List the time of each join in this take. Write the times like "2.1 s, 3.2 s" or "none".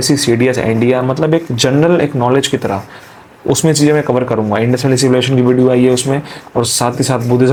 none